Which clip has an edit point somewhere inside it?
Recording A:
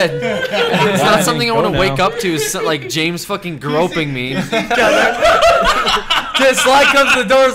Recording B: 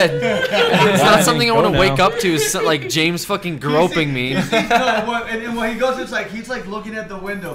B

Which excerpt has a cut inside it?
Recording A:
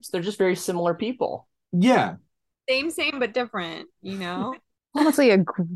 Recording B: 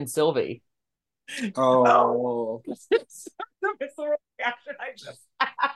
A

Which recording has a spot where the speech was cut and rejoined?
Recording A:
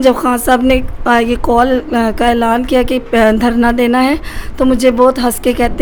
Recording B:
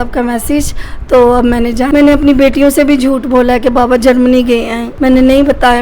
B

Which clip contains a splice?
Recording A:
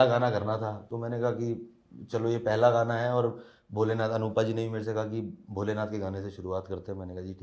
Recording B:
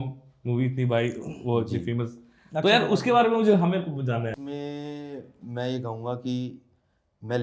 B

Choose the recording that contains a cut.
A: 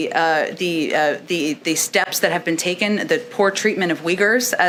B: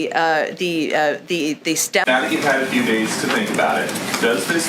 B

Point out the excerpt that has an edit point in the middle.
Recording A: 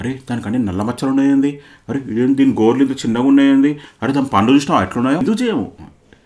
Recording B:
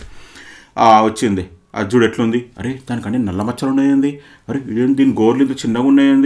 A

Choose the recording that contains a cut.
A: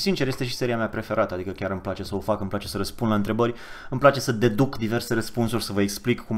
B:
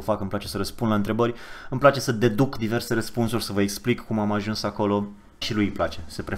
B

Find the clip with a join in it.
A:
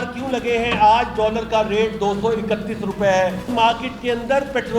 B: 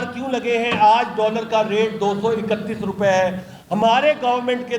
A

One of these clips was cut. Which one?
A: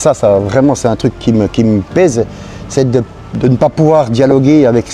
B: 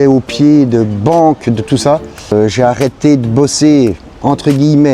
B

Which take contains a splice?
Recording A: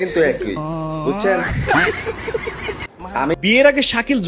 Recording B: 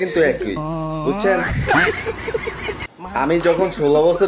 A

